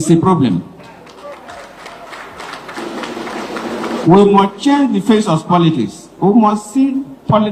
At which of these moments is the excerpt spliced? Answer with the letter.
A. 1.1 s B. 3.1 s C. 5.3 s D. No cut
D